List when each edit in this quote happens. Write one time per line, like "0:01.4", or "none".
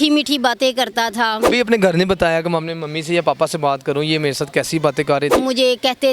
0:01.4
0:05.3